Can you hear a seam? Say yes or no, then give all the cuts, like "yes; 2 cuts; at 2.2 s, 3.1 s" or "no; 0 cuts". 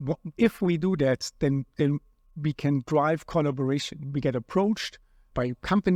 no; 0 cuts